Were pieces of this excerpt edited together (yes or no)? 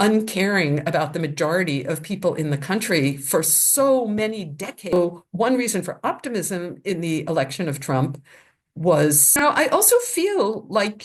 yes